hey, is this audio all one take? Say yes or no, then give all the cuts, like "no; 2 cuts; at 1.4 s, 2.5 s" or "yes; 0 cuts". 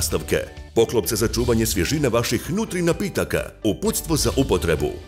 yes; 0 cuts